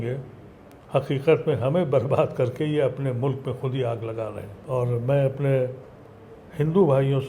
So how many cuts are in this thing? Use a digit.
1